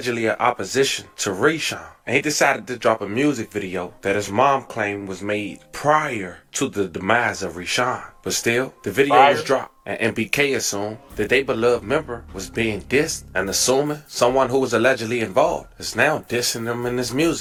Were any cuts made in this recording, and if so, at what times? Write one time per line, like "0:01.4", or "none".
none